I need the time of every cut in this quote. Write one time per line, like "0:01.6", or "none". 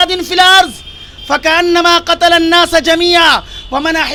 none